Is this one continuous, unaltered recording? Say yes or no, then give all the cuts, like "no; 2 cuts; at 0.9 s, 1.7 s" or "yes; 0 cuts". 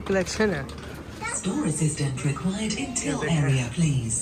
yes; 0 cuts